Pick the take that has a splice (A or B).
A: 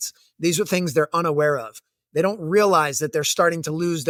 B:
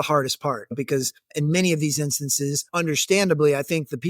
B